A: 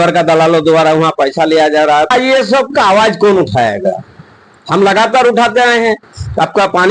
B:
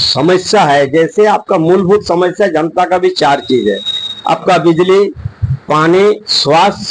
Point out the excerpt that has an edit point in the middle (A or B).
A